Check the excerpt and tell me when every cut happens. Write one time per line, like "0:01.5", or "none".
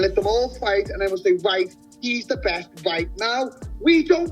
0:01.2